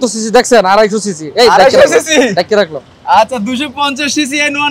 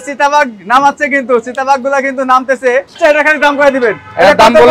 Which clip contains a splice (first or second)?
second